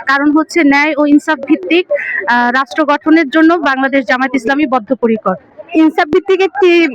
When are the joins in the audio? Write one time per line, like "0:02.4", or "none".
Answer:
none

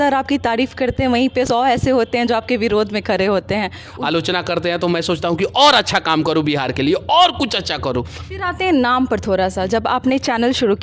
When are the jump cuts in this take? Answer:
0:01.5
0:03.9
0:08.2

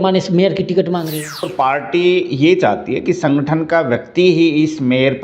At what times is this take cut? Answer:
0:01.5

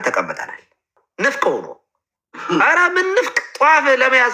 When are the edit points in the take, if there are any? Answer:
0:01.0

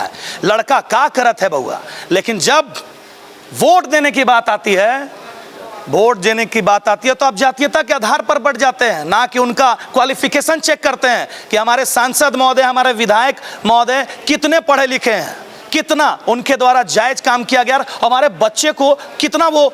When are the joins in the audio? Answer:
none

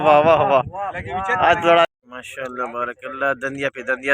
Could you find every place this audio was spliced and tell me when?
0:01.9

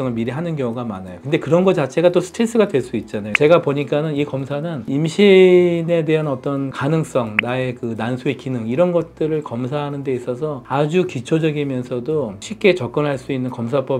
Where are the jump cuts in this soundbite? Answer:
0:03.2

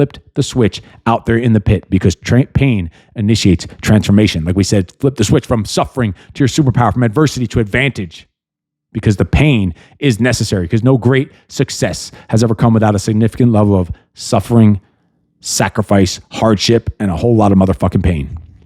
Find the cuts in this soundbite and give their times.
none

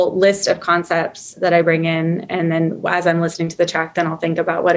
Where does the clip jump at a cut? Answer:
none

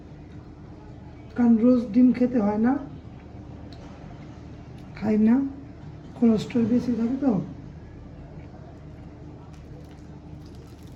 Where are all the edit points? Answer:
none

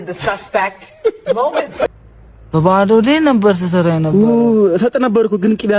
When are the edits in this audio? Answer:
0:02.1

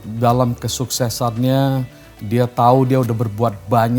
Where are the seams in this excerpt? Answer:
none

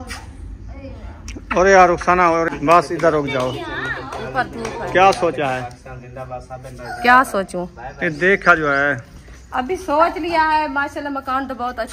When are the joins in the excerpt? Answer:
0:02.5

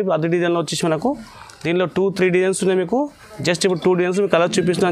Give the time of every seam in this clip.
none

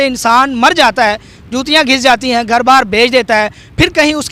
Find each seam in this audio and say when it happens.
none

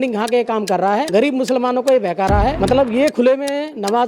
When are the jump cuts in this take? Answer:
0:01.1
0:02.6

